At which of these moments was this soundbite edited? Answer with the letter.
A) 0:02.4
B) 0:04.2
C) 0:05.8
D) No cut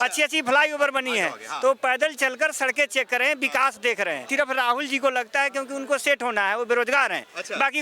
B